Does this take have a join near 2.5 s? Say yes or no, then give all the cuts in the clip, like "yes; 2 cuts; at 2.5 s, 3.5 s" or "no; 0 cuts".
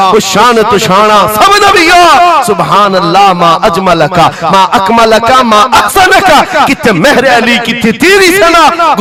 no; 0 cuts